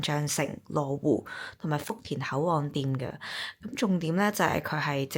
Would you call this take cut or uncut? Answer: uncut